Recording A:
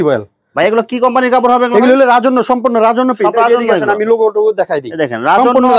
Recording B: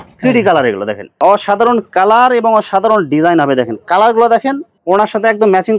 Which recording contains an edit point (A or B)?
B